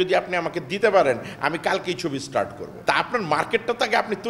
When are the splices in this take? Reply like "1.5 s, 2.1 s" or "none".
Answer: 2.7 s